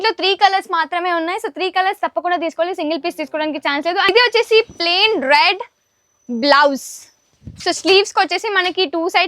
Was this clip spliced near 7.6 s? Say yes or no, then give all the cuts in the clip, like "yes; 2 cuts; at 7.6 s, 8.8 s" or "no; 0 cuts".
no; 1 cut; at 4.1 s